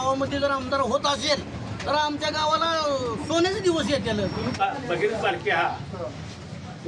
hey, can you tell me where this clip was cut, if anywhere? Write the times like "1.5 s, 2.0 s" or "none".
4.6 s